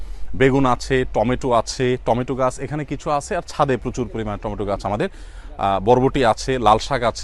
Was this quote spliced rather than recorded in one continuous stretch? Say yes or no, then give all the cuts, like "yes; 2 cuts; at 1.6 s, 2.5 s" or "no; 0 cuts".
no; 0 cuts